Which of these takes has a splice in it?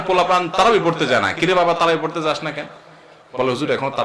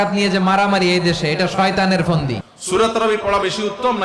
second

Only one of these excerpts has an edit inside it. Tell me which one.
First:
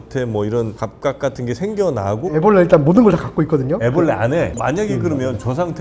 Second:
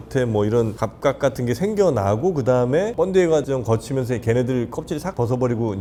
first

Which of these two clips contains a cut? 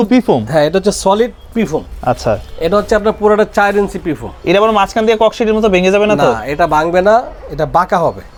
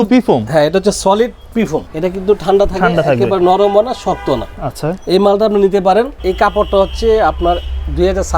second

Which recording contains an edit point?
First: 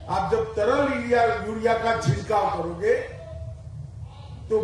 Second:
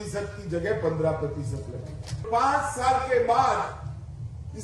second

